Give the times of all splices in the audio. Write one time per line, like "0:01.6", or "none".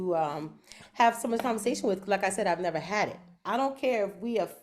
0:03.4